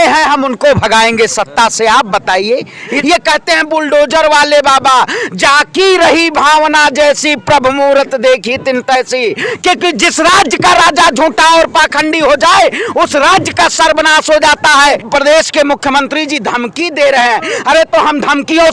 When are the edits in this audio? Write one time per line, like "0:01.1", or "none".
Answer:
0:02.9
0:09.5
0:15.0